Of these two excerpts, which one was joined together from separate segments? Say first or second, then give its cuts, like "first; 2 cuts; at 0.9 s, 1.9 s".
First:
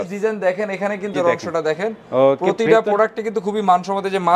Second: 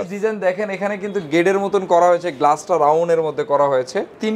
first; 1 cut; at 1.1 s